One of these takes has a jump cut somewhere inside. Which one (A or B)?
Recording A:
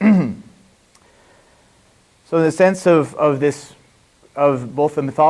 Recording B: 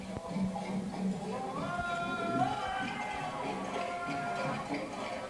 B